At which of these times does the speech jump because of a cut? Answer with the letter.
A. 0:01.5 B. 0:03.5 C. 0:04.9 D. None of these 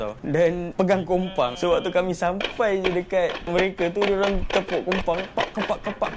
B